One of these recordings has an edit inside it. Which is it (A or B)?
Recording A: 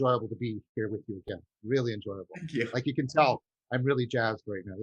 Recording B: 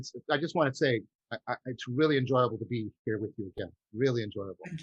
B